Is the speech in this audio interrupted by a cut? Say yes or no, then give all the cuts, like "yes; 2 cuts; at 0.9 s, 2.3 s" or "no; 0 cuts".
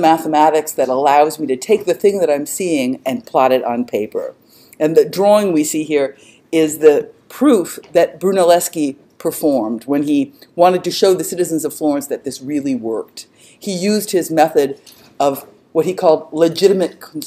yes; 1 cut; at 8.7 s